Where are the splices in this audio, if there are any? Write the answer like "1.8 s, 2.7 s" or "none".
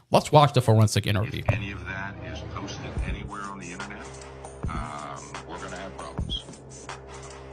1.6 s